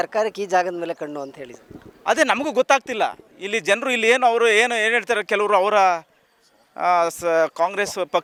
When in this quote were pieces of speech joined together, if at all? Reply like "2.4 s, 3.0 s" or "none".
none